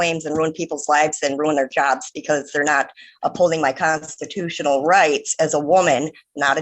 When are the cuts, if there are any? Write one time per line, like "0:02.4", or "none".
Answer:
none

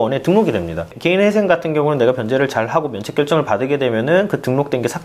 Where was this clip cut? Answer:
0:00.9

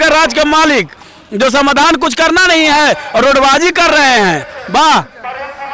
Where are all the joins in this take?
none

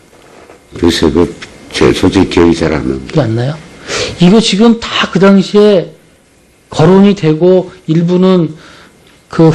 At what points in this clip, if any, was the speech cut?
0:04.6

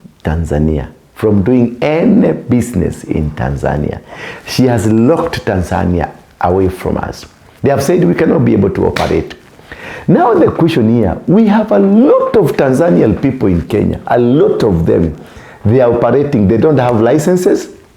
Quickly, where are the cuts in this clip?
none

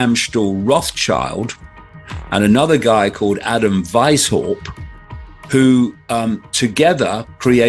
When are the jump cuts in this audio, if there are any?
none

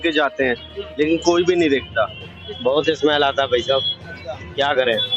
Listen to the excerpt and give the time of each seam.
0:02.5

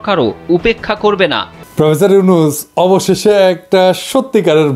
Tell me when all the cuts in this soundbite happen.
0:01.6

